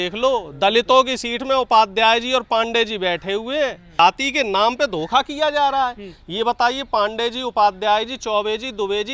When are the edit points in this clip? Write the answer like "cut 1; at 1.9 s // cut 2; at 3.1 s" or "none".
cut 1; at 4.0 s